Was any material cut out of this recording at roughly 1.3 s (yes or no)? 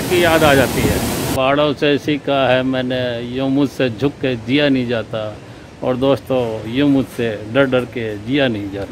yes